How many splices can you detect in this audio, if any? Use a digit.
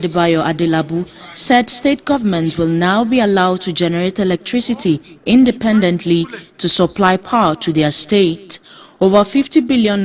0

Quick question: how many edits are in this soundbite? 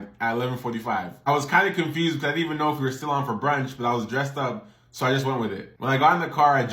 0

